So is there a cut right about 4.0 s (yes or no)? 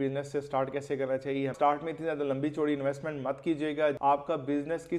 yes